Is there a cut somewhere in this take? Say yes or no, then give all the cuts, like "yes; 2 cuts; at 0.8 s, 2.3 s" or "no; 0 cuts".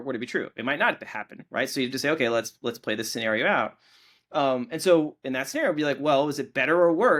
no; 0 cuts